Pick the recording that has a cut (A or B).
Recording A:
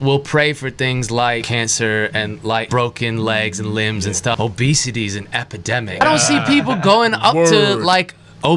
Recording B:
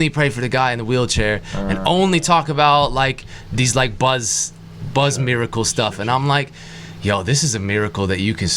A